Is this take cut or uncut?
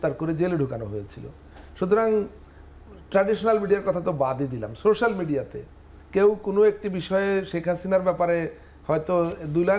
uncut